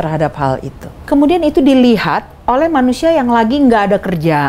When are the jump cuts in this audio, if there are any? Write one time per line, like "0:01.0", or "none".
0:00.9